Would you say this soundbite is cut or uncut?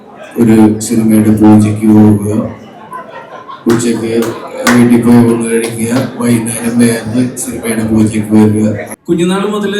cut